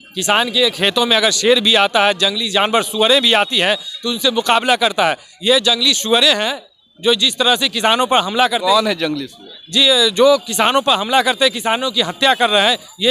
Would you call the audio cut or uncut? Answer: uncut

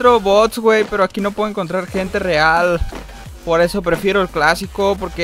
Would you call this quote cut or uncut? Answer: uncut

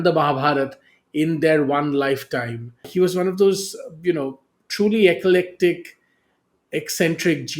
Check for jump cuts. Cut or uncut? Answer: cut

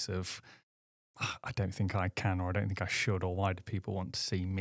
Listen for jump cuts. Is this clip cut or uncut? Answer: uncut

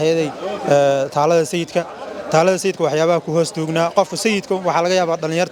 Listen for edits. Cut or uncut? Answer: uncut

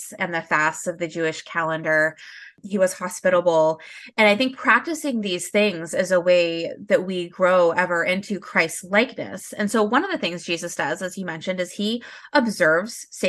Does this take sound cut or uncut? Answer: uncut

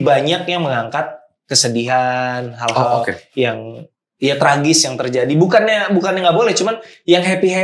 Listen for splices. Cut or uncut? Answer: uncut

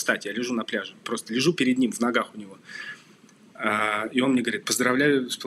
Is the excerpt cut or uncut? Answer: uncut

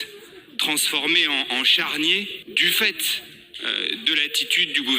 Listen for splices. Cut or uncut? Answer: cut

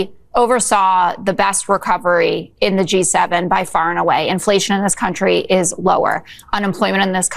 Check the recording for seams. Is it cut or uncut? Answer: uncut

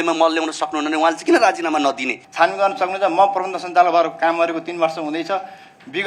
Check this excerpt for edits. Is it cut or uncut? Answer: cut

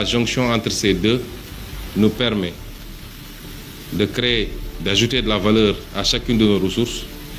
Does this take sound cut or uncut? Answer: uncut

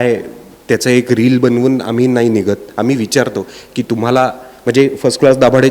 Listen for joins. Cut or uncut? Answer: uncut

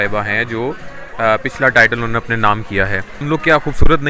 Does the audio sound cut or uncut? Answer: cut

